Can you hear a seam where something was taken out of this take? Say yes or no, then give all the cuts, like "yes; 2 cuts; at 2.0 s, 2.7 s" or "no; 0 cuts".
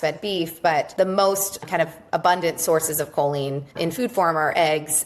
yes; 2 cuts; at 0.9 s, 3.6 s